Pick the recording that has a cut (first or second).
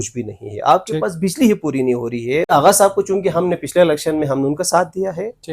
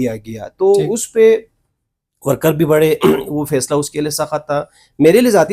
first